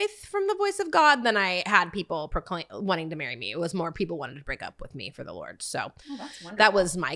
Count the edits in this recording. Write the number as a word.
zero